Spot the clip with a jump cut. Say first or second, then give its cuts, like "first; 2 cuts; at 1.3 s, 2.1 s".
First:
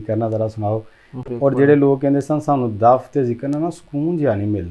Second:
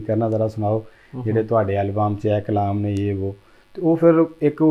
first; 1 cut; at 1.2 s